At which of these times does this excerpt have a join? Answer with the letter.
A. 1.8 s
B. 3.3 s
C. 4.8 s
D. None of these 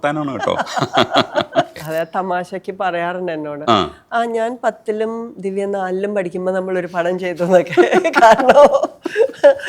A